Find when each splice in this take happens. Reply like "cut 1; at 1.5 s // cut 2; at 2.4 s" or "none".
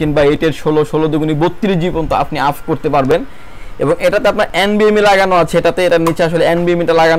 none

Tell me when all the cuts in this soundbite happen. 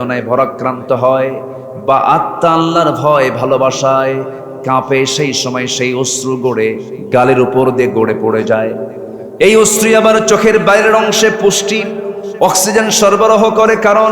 cut 1; at 6.9 s

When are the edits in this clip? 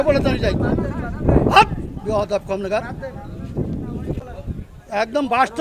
cut 1; at 4.2 s

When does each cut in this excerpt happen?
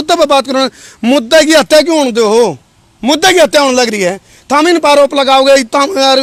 none

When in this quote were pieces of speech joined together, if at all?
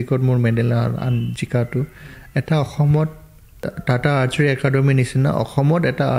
cut 1; at 3.8 s

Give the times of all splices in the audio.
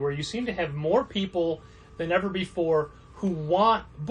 none

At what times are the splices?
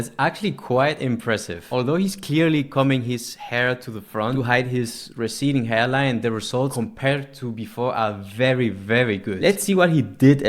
cut 1; at 1.6 s // cut 2; at 4.3 s // cut 3; at 6.7 s // cut 4; at 9.3 s

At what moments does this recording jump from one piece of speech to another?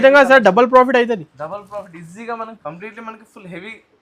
cut 1; at 2.5 s

